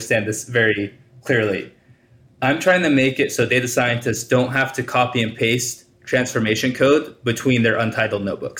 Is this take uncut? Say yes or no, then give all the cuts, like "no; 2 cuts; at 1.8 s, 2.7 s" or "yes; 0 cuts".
no; 1 cut; at 1.1 s